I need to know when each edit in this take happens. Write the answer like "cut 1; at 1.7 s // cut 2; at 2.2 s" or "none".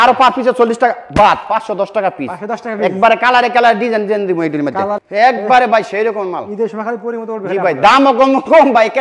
cut 1; at 5.0 s